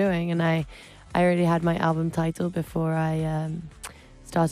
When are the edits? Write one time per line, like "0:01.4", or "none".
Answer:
none